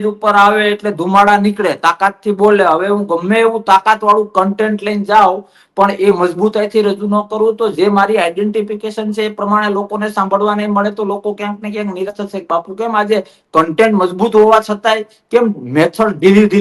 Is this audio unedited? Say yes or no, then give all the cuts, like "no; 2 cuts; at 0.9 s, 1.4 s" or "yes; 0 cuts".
yes; 0 cuts